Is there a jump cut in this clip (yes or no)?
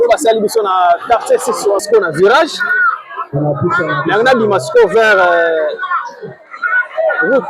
yes